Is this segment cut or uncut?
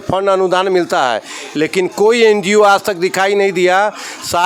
uncut